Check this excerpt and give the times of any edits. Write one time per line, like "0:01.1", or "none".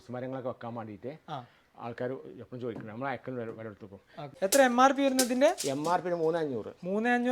0:04.2